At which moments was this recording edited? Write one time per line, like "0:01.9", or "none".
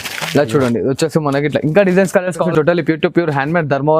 0:02.4